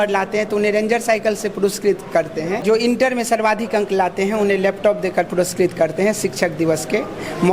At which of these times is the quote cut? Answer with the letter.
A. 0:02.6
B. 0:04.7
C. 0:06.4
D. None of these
A